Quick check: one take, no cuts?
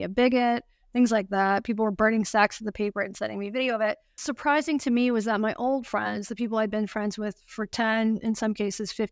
no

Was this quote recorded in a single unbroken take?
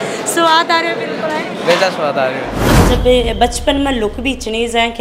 no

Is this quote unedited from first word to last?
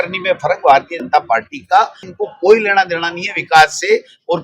no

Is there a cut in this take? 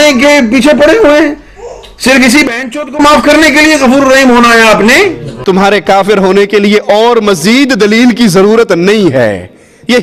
no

